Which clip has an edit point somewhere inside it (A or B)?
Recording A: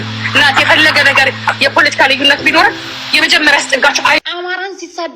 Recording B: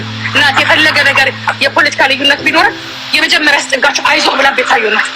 A